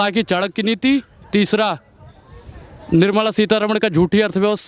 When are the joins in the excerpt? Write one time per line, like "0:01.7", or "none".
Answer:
none